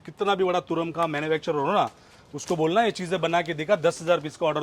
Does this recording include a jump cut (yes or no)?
no